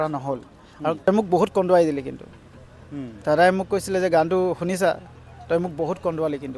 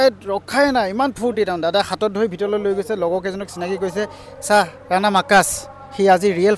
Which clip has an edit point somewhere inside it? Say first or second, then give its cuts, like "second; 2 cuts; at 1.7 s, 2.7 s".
first; 1 cut; at 1.1 s